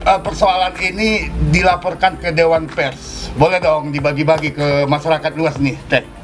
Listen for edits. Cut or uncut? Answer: uncut